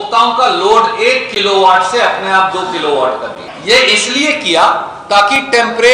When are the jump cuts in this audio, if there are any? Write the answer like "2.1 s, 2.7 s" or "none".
3.5 s